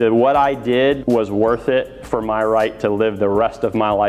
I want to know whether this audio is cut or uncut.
uncut